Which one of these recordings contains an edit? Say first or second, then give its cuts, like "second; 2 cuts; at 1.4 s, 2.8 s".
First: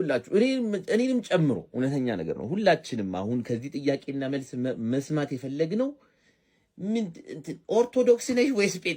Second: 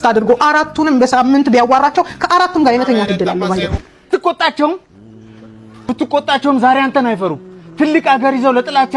second; 1 cut; at 3.9 s